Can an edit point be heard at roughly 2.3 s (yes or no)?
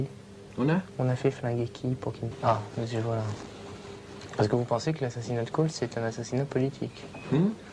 no